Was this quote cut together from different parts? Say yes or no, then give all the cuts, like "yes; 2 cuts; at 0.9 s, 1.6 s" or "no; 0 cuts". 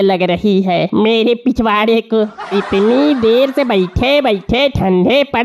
no; 0 cuts